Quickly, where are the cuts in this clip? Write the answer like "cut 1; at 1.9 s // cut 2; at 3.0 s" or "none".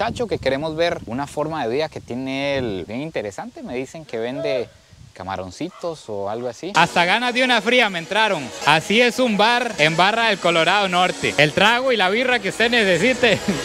cut 1; at 6.7 s